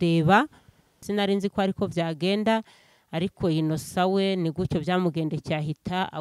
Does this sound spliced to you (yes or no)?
yes